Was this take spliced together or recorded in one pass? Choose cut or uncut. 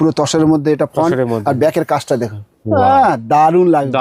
uncut